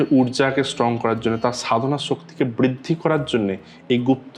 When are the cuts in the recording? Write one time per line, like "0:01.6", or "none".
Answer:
none